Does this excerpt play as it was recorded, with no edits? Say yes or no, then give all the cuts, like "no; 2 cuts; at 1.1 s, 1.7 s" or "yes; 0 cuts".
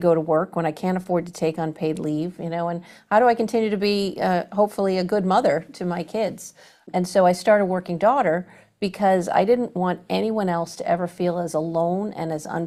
yes; 0 cuts